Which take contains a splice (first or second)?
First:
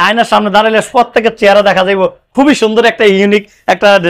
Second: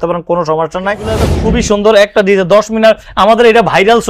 second